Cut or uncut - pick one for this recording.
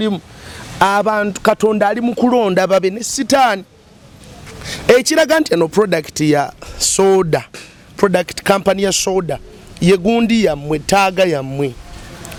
uncut